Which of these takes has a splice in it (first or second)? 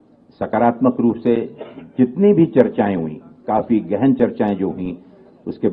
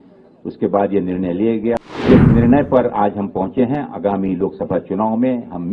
second